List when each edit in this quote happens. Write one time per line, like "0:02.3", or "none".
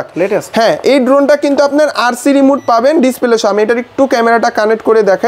none